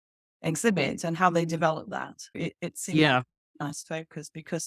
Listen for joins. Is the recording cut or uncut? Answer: uncut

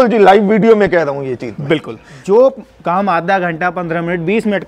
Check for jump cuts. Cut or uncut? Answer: cut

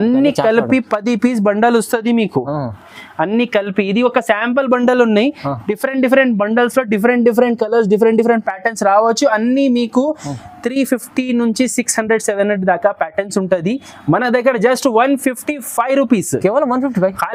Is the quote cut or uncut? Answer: uncut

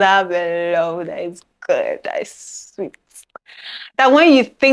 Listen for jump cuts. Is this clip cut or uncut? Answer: uncut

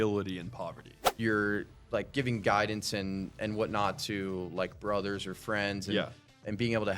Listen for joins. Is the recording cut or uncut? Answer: cut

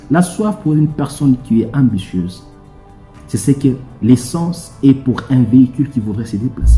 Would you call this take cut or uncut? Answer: uncut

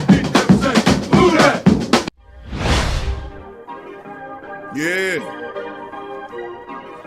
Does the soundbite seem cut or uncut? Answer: cut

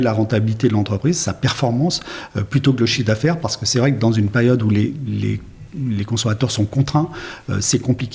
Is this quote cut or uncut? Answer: uncut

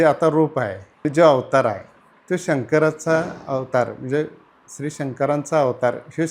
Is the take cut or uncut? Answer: uncut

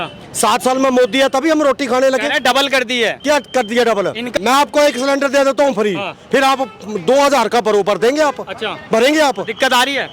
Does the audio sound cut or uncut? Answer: cut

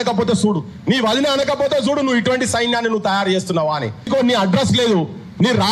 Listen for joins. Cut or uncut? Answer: cut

